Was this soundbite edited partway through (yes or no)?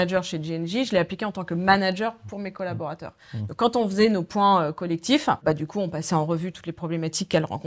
no